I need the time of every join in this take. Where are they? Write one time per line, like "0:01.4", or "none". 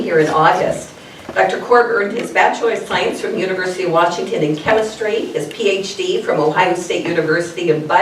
none